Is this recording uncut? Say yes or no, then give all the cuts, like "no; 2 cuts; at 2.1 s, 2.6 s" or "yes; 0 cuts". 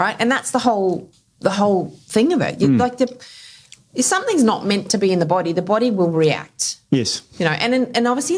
yes; 0 cuts